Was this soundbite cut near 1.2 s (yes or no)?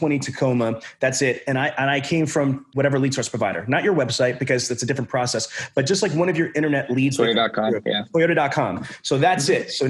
no